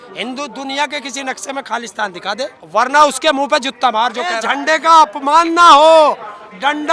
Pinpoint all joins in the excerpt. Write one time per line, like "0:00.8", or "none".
0:02.6
0:04.4